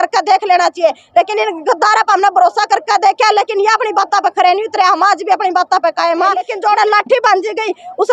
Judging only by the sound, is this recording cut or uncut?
cut